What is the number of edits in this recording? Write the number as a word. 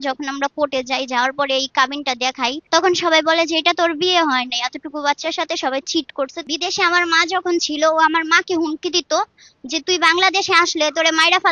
two